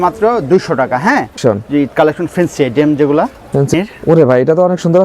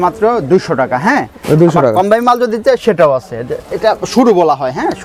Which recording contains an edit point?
first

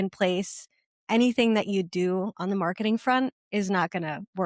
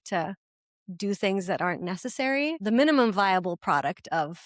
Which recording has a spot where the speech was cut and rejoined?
second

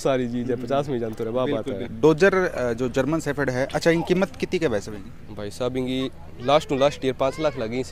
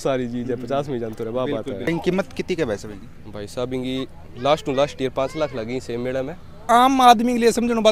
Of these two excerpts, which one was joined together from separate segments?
second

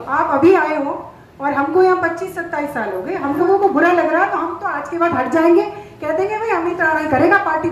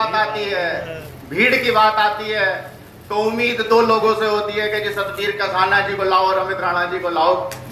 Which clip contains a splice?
first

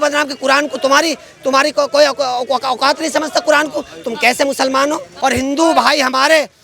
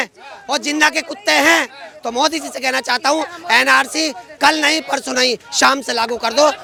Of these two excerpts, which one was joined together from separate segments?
first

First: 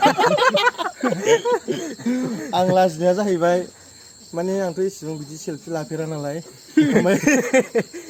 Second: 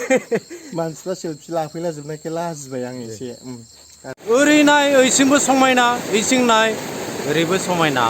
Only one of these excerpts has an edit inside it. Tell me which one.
second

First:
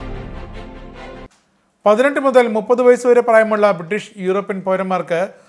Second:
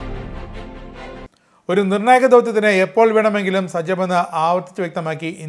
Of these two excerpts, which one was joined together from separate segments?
second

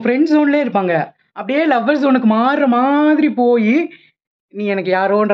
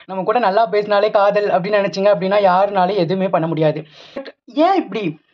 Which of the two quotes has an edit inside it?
second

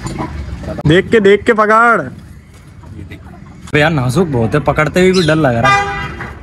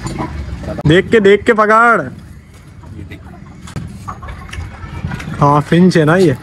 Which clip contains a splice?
first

